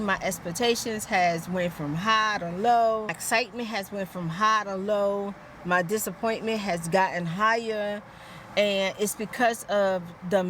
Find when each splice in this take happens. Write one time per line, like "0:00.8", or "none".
0:03.2